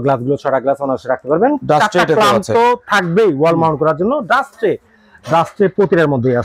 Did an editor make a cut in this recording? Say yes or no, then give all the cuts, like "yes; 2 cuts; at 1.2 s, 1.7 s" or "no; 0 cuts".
no; 0 cuts